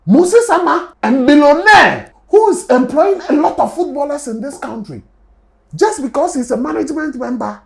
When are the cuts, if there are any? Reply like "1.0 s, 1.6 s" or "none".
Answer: 0.9 s, 2.1 s